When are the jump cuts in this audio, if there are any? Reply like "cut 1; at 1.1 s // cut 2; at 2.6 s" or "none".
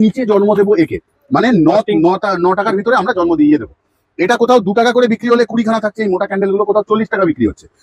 none

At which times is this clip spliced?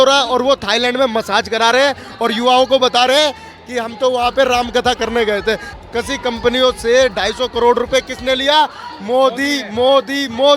cut 1; at 5.7 s

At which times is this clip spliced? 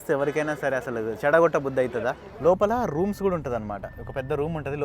cut 1; at 2.2 s

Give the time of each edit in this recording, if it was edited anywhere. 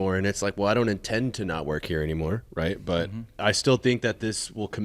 cut 1; at 3.4 s

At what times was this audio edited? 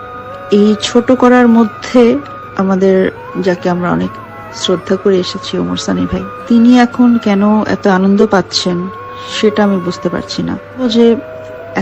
cut 1; at 2.4 s // cut 2; at 3.3 s // cut 3; at 6.3 s // cut 4; at 10.8 s

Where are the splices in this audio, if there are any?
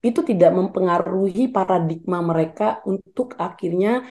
none

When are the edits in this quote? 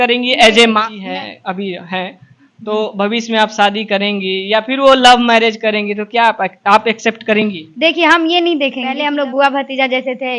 cut 1; at 0.9 s // cut 2; at 9.0 s

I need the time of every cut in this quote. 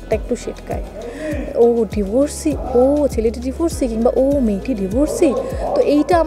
none

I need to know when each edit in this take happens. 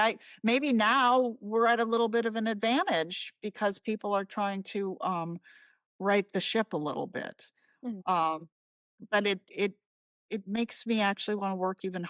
none

